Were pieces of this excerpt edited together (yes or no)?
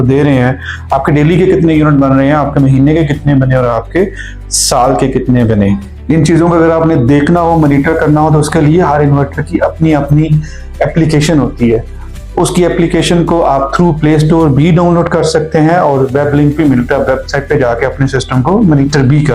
yes